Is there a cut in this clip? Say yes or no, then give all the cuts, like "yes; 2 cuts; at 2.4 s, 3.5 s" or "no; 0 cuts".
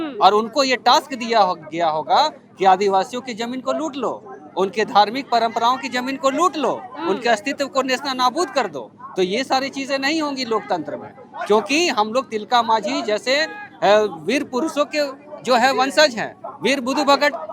no; 0 cuts